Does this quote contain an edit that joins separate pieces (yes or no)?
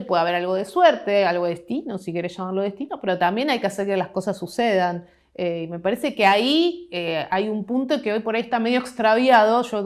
no